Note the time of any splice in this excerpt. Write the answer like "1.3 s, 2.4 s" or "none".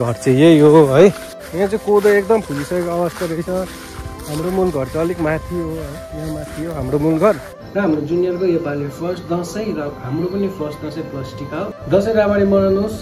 1.5 s, 7.5 s, 11.7 s